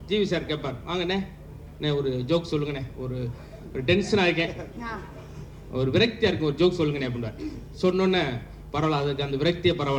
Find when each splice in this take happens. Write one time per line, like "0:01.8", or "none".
none